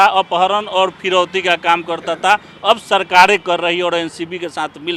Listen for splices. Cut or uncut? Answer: uncut